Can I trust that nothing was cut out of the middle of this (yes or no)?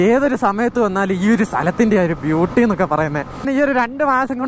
no